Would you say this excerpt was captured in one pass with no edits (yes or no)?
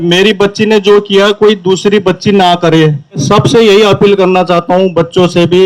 no